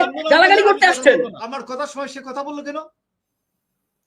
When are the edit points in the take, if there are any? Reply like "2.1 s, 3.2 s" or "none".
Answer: 1.6 s